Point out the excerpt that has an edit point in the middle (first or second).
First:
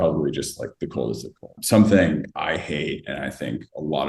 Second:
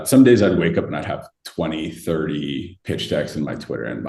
first